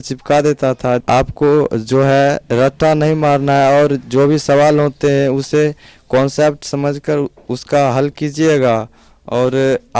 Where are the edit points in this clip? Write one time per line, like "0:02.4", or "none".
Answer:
0:01.0